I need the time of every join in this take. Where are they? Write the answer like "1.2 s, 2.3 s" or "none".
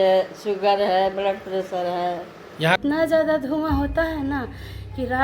2.8 s

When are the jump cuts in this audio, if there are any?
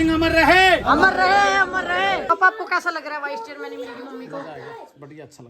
2.3 s

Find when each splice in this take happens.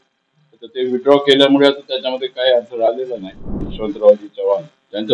3.6 s

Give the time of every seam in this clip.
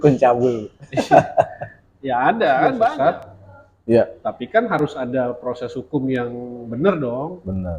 3.1 s

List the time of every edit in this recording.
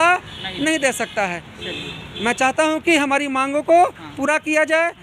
none

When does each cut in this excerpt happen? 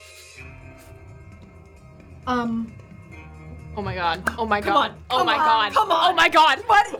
none

